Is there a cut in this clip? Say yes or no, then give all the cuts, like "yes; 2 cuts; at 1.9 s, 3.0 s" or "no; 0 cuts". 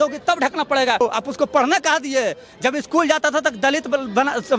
yes; 1 cut; at 1.0 s